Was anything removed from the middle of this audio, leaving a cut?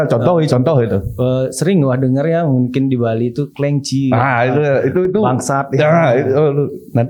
no; 0 cuts

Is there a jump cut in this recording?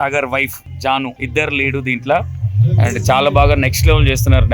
yes; 1 cut; at 0.9 s

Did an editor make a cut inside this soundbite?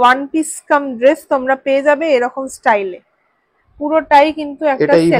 no; 0 cuts

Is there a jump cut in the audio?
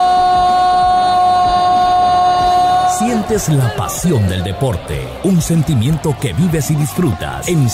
no; 0 cuts

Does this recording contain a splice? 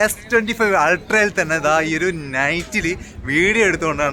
no; 0 cuts

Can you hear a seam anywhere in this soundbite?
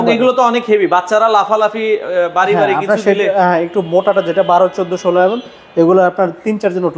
no; 0 cuts

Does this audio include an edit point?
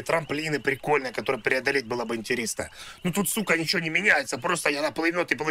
no; 0 cuts

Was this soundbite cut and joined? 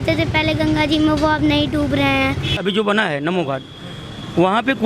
yes; 1 cut; at 2.5 s

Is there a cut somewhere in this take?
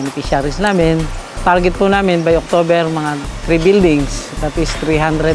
no; 0 cuts

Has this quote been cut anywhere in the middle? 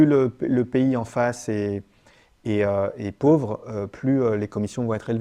no; 0 cuts

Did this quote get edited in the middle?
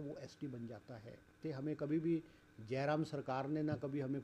yes; 1 cut; at 1.4 s

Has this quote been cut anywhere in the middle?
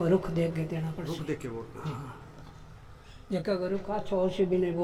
no; 0 cuts

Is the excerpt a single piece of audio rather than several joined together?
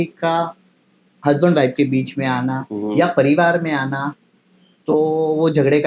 yes; 0 cuts

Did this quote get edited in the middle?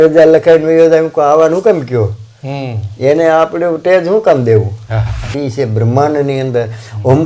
yes; 1 cut; at 5.3 s

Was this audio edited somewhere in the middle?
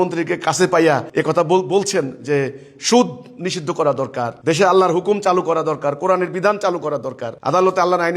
yes; 2 cuts; at 1.1 s, 4.3 s

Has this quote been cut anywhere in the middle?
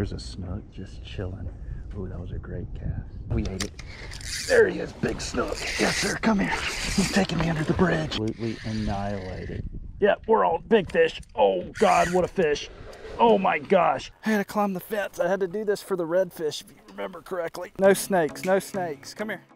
yes; 4 cuts; at 3.3 s, 8.2 s, 14.1 s, 17.7 s

